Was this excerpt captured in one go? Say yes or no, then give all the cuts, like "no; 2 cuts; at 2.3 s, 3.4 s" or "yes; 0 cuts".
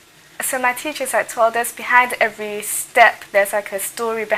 yes; 0 cuts